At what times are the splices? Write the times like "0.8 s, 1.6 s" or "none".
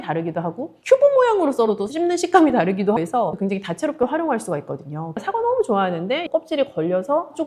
3.2 s, 5.2 s, 6.3 s